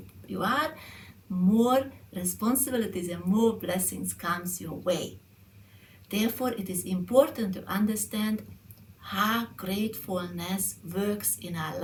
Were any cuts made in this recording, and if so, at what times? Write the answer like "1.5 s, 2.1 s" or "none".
none

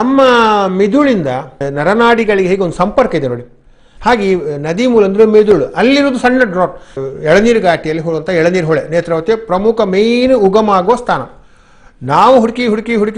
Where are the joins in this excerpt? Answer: 1.6 s, 6.9 s

